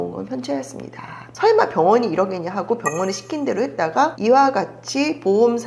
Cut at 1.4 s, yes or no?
yes